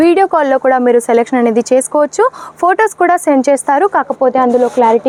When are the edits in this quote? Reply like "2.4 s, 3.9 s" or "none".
none